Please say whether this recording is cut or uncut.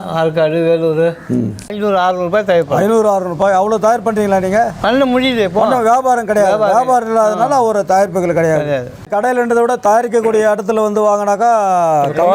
cut